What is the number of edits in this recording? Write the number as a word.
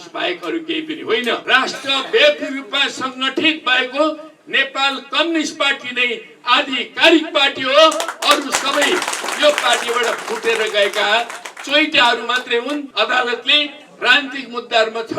two